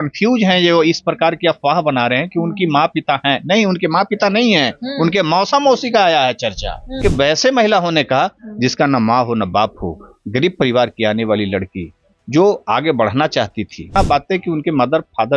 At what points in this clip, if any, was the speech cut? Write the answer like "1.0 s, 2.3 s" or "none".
7.0 s, 13.9 s